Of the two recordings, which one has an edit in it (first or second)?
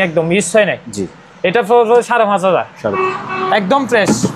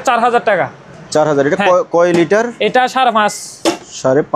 first